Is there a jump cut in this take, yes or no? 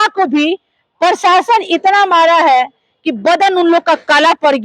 no